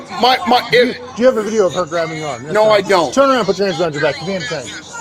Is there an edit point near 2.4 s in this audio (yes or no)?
yes